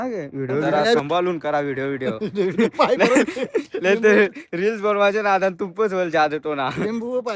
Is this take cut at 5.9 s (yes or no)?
no